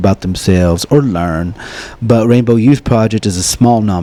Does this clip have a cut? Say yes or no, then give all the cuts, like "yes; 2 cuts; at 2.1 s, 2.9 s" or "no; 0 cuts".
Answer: no; 0 cuts